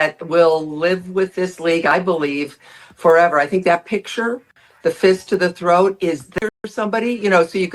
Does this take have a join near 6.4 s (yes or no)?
yes